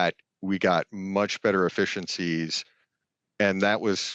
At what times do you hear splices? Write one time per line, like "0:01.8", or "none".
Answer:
none